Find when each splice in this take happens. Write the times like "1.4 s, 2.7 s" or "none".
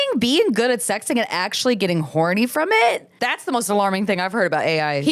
3.1 s

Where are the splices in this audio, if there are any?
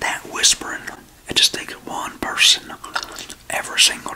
1.1 s

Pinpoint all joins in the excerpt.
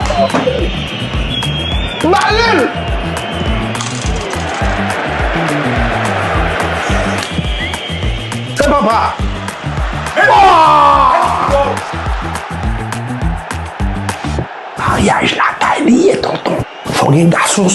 none

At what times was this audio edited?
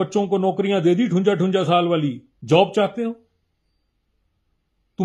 2.3 s

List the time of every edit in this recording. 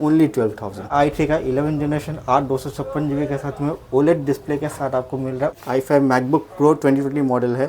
0.9 s, 5.6 s

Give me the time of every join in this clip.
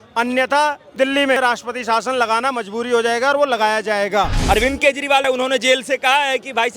4.4 s, 5.2 s

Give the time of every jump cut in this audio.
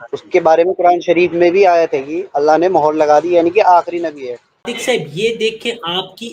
4.7 s

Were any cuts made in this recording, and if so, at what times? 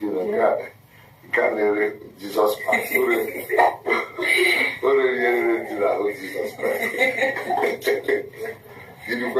none

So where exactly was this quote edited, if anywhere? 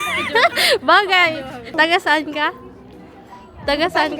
1.7 s

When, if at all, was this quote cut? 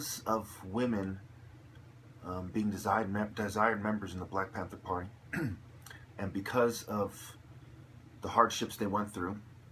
4.0 s

